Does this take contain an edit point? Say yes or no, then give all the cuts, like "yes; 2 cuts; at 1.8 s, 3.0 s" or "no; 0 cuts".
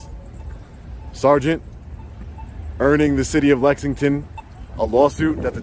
no; 0 cuts